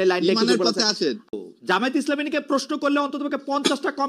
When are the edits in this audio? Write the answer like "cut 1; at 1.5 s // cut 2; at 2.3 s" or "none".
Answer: cut 1; at 1.3 s